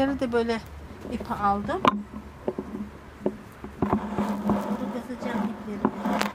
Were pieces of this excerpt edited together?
no; 0 cuts

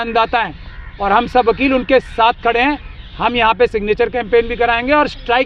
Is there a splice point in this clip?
no; 0 cuts

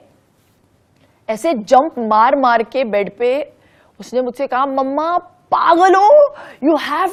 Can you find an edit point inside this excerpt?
no; 0 cuts

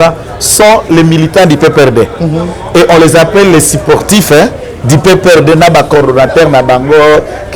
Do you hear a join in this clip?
no; 0 cuts

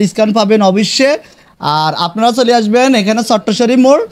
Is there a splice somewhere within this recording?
no; 0 cuts

